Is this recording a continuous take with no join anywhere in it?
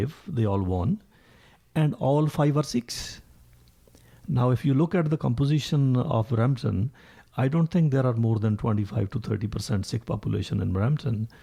yes; 0 cuts

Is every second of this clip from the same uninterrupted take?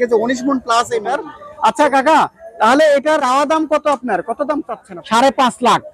no; 3 cuts; at 1.1 s, 3.2 s, 4.8 s

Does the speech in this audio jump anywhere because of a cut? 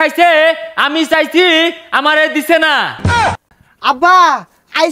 yes; 1 cut; at 3.2 s

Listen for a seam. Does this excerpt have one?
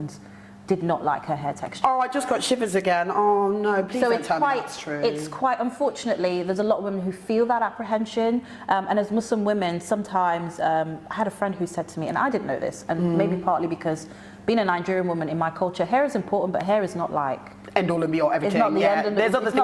no; 0 cuts

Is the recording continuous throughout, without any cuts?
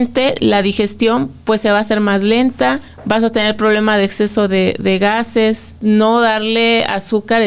no; 2 cuts; at 2.9 s, 5.8 s

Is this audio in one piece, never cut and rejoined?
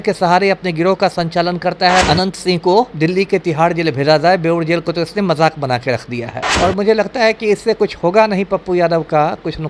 no; 2 cuts; at 2.0 s, 6.4 s

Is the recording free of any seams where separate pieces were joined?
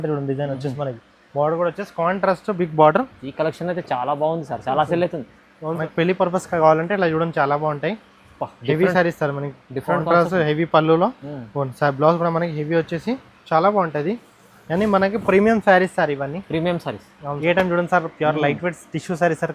no; 2 cuts; at 5.8 s, 17.4 s

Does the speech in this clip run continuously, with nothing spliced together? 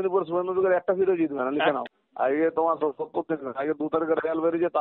no; 1 cut; at 2.0 s

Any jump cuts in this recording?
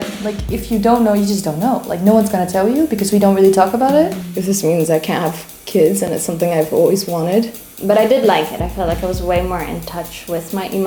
yes; 2 cuts; at 4.3 s, 7.6 s

